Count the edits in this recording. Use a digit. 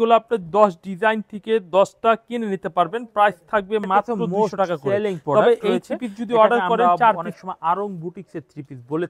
1